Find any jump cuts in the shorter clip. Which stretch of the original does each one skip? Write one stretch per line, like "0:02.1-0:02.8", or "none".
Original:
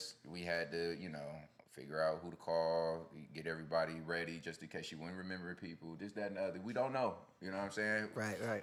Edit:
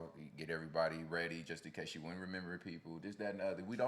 none